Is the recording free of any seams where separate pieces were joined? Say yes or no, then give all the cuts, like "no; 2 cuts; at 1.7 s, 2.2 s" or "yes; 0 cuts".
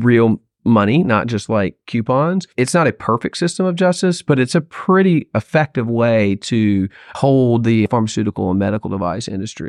no; 3 cuts; at 2.5 s, 7.1 s, 7.9 s